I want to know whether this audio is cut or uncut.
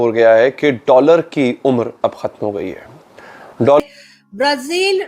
cut